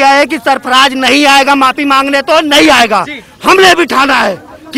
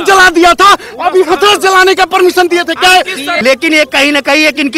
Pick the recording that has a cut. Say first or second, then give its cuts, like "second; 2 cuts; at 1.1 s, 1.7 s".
second; 1 cut; at 3.2 s